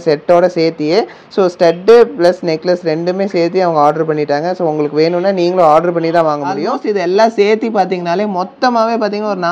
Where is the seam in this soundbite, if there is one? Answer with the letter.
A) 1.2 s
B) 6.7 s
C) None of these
B